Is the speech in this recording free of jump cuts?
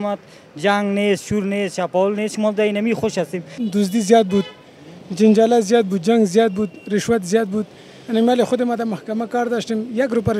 no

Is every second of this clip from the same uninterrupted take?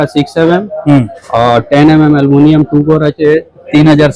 yes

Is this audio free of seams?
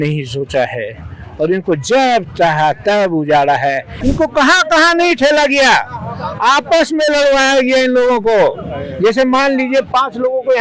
no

